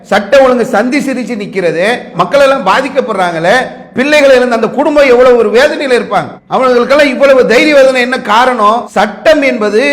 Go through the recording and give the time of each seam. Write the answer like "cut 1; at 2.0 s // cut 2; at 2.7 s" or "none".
none